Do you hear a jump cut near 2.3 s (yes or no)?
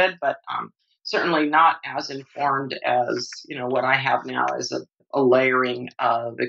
no